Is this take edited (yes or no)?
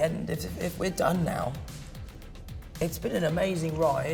no